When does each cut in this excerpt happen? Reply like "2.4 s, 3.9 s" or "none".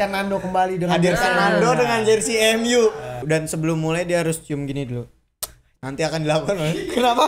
3.2 s